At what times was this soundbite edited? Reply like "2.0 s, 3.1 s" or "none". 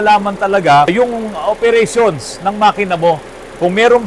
0.9 s